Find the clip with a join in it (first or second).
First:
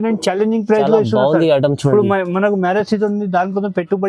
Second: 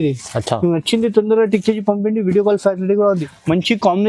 second